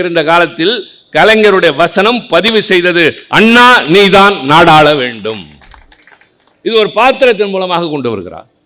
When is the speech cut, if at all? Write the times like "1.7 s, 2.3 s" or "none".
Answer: none